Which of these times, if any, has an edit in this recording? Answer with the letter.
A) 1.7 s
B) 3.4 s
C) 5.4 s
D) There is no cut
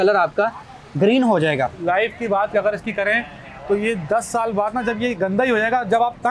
A